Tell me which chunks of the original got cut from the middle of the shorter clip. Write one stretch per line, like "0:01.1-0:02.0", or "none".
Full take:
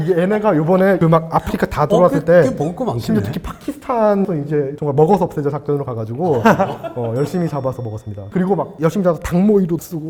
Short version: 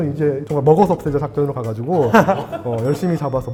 none